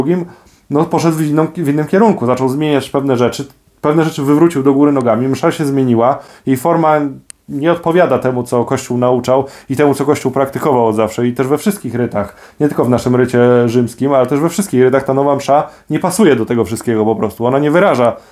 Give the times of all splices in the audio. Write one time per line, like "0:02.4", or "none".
none